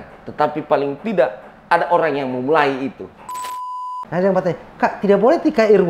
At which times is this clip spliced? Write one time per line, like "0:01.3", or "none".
0:03.6